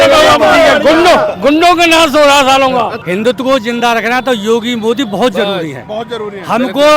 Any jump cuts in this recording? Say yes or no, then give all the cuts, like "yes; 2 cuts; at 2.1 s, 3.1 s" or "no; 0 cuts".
yes; 1 cut; at 3.0 s